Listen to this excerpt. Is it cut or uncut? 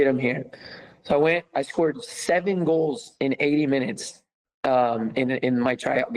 uncut